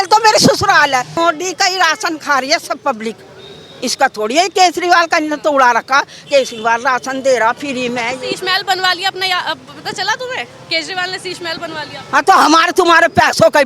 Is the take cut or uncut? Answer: cut